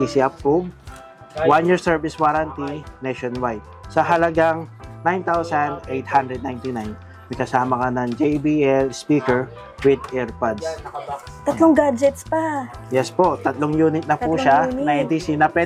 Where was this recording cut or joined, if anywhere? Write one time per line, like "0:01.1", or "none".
none